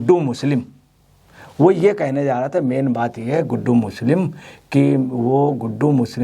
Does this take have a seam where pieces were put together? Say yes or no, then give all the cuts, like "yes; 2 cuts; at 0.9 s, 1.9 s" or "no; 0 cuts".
no; 0 cuts